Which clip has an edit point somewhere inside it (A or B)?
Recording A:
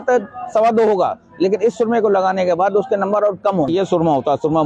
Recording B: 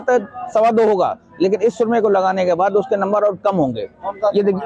A